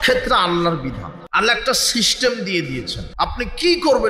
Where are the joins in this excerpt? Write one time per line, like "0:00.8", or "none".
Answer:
0:01.1
0:03.0